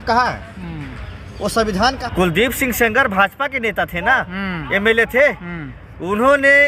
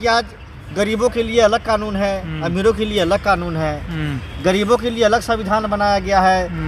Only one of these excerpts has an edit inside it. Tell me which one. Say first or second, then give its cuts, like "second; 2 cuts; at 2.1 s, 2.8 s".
first; 1 cut; at 2.0 s